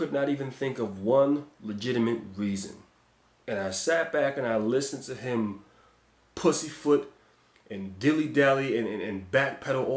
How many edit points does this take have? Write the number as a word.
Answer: zero